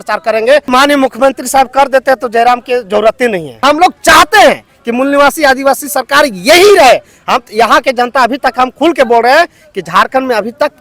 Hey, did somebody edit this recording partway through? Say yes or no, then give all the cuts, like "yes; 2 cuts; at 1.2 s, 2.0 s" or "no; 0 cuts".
yes; 2 cuts; at 0.7 s, 3.6 s